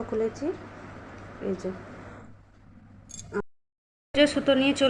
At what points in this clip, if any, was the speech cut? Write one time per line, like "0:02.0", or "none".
0:03.4